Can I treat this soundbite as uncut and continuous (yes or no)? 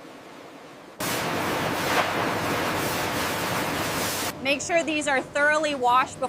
no